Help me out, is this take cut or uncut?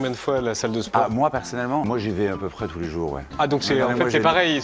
cut